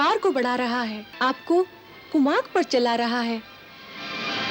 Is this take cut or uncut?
cut